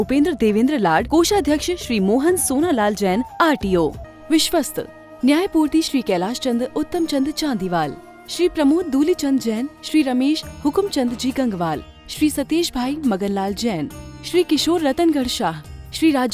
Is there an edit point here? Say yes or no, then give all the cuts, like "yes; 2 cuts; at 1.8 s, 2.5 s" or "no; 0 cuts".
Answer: yes; 1 cut; at 4.1 s